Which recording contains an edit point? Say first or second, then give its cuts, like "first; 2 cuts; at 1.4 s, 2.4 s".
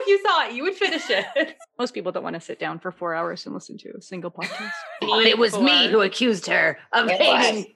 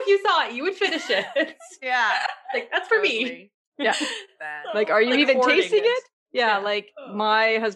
first; 2 cuts; at 1.6 s, 5.0 s